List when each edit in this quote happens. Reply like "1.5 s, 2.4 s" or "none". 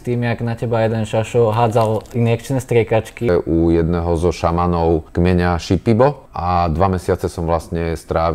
3.3 s, 5.1 s, 6.3 s